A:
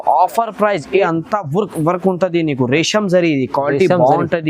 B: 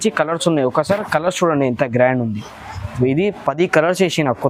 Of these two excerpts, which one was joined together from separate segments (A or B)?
A